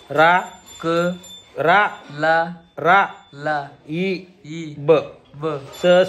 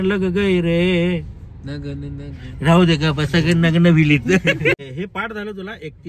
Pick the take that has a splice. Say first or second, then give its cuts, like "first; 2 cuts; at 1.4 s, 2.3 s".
second; 1 cut; at 4.8 s